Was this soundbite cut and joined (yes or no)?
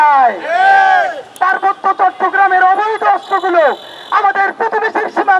yes